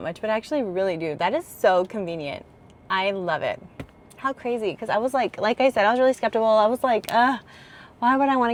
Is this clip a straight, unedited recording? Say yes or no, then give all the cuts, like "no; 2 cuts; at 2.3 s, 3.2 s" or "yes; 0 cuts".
yes; 0 cuts